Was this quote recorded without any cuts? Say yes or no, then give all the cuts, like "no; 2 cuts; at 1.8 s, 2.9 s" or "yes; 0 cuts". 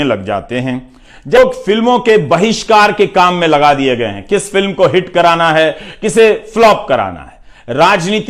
no; 1 cut; at 1.4 s